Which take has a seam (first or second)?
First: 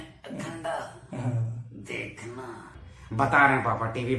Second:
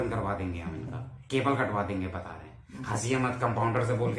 first